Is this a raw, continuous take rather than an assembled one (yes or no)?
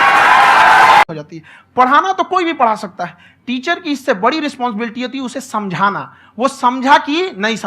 no